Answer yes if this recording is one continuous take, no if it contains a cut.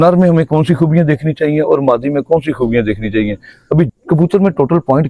no